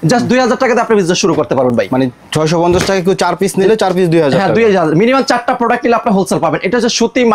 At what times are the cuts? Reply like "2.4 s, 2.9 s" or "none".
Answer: none